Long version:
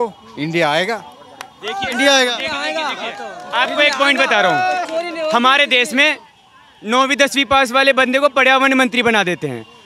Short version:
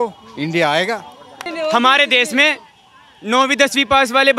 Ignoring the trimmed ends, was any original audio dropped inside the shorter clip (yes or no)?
yes